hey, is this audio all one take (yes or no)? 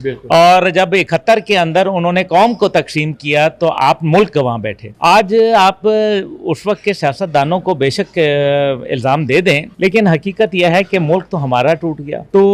yes